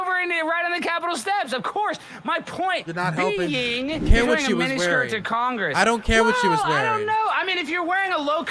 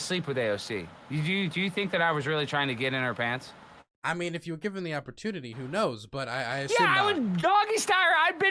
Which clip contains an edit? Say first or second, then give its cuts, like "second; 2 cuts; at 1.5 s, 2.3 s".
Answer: first; 1 cut; at 4.1 s